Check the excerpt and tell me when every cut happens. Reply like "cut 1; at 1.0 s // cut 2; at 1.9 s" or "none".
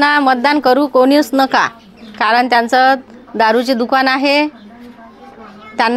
none

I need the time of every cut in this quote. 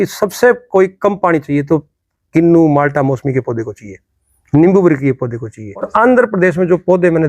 cut 1; at 5.9 s

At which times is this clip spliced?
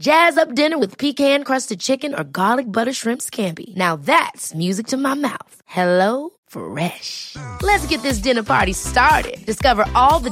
none

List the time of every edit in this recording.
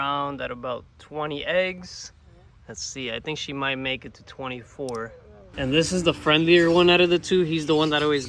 cut 1; at 5.5 s

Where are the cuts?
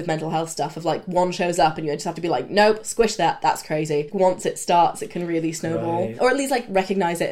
cut 1; at 4.1 s // cut 2; at 6.1 s

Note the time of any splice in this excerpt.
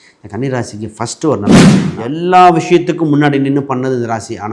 cut 1; at 1.8 s

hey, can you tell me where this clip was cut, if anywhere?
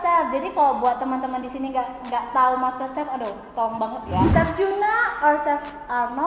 cut 1; at 4.3 s

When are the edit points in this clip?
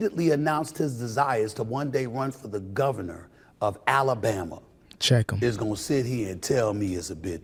none

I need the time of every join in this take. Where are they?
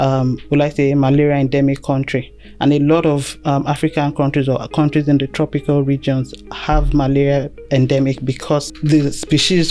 cut 1; at 8.7 s

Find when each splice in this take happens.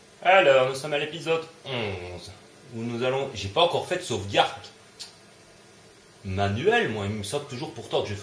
cut 1; at 2.0 s

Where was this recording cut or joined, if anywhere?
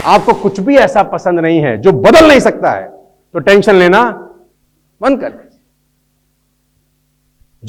none

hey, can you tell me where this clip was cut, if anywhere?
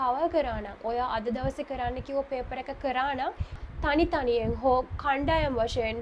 cut 1; at 3.6 s

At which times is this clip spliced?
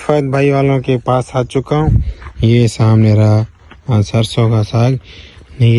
none

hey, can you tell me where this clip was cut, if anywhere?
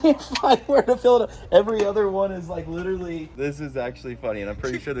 cut 1; at 3.2 s

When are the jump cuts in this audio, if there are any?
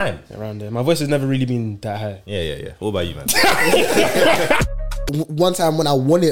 cut 1; at 4.8 s

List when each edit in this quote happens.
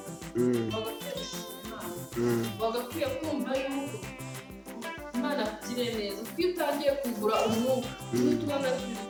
none

